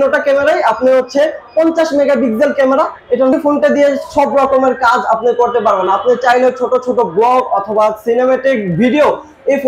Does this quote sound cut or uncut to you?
cut